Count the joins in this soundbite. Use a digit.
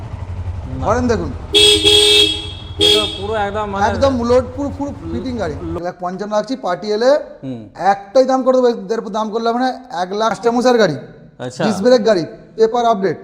2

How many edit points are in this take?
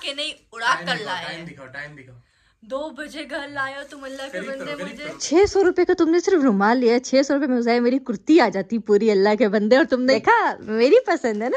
2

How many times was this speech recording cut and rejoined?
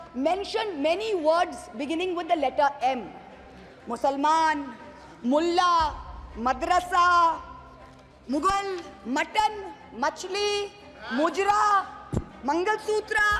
0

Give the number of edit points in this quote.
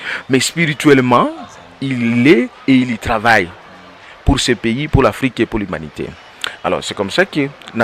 0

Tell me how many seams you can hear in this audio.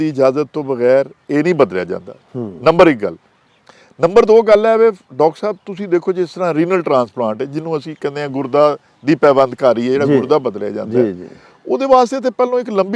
0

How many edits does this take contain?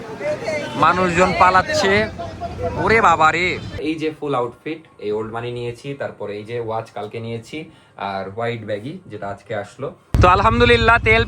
2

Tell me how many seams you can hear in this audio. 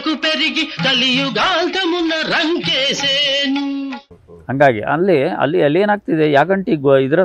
0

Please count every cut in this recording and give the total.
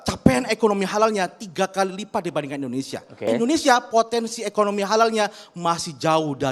1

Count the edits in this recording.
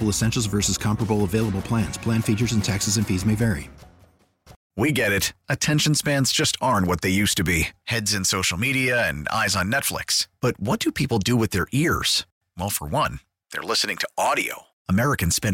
1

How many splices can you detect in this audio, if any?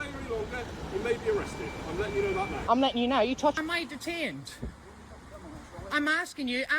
1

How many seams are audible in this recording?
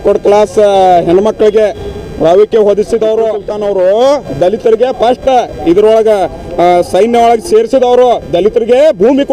1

